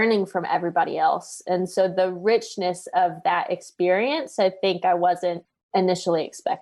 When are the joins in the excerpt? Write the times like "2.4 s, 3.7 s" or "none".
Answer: 5.5 s